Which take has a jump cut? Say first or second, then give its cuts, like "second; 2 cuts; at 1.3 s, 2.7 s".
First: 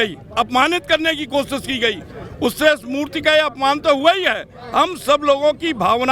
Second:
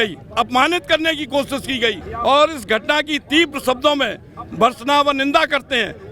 second; 1 cut; at 2.1 s